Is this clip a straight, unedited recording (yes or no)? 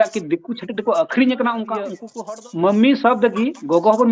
no